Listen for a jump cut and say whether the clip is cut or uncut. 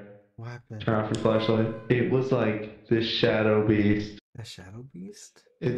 cut